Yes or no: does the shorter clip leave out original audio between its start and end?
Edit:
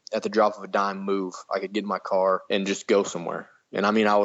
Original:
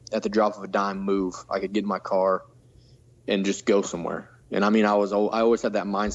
yes